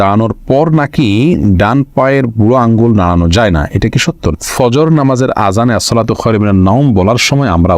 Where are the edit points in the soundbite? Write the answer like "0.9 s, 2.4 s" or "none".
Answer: 4.3 s

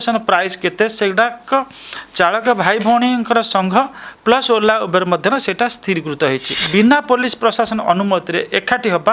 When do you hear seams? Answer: 6.5 s

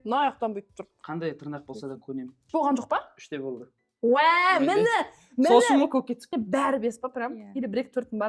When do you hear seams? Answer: 2.5 s, 6.3 s

